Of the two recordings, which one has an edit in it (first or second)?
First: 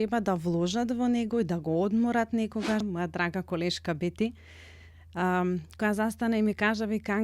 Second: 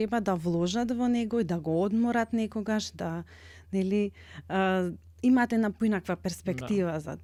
first